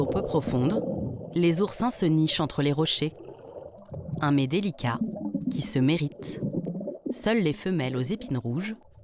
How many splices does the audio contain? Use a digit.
0